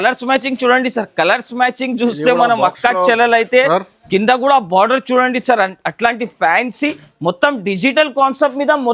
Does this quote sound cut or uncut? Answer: cut